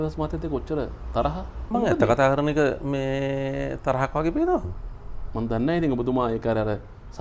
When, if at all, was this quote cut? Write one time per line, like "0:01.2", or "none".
none